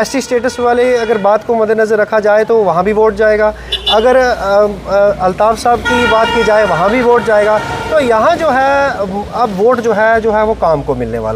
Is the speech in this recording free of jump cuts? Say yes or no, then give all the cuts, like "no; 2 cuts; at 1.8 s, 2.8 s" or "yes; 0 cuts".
yes; 0 cuts